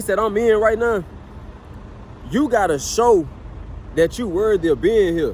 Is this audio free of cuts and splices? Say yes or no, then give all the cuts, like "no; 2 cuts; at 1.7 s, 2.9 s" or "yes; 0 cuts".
yes; 0 cuts